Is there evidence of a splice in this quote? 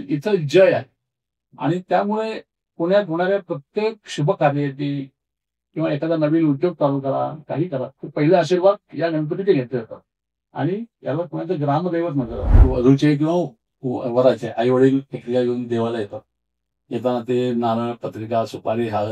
yes; 1 cut; at 12.6 s

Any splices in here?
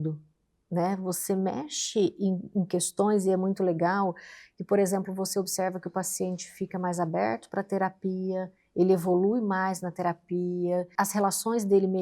yes; 1 cut; at 10.9 s

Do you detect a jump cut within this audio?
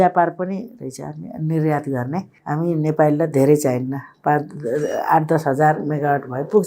yes; 1 cut; at 2.3 s

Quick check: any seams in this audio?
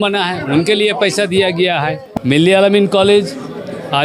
yes; 1 cut; at 2.0 s

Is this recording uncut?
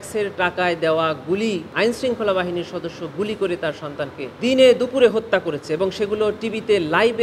no; 2 cuts; at 1.7 s, 4.3 s

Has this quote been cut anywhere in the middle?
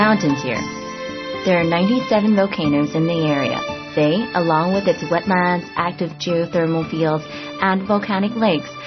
no; 0 cuts

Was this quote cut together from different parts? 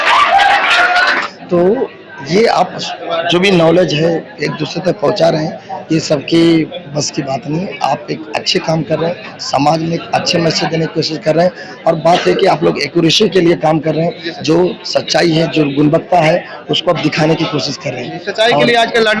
yes; 1 cut; at 1.3 s

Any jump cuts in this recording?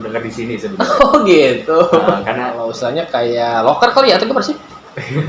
yes; 1 cut; at 2.6 s

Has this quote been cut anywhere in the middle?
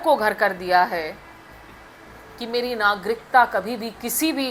no; 0 cuts

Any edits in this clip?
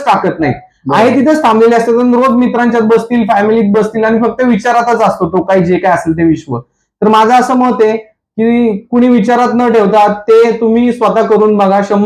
no; 0 cuts

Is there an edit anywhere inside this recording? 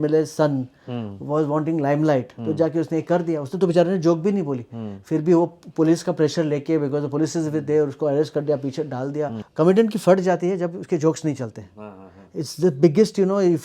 yes; 1 cut; at 9.4 s

